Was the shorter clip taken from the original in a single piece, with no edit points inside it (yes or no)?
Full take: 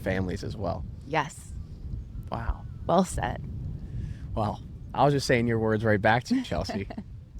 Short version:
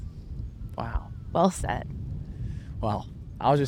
yes